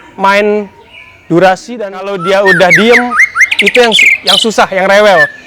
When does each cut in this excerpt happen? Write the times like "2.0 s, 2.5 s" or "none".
2.2 s

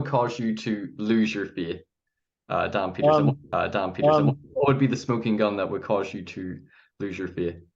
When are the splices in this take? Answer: none

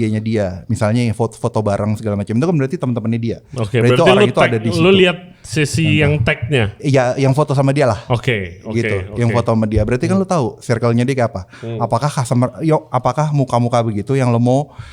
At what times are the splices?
none

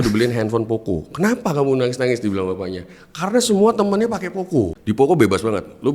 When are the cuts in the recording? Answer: 4.8 s

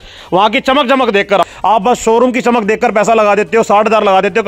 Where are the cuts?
1.4 s

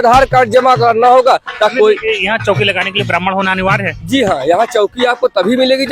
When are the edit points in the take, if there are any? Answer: 1.7 s

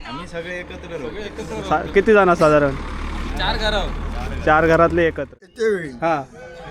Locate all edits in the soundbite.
5.4 s

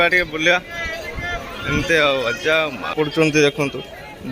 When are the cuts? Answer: 2.9 s

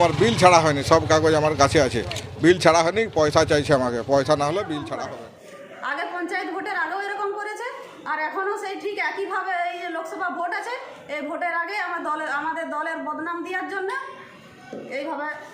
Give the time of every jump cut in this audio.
4.9 s

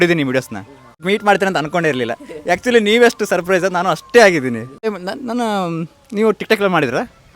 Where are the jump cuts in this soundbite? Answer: 1.0 s, 4.9 s

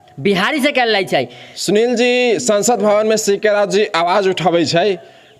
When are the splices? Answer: 1.5 s

